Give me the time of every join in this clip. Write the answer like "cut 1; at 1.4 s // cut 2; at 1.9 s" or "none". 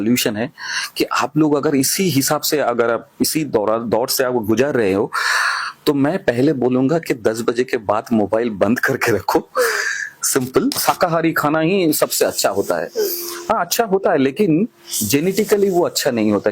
cut 1; at 10.8 s